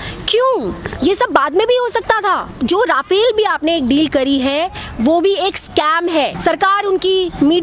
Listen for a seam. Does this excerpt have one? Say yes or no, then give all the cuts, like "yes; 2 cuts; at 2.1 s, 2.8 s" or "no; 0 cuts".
yes; 2 cuts; at 2.5 s, 6.3 s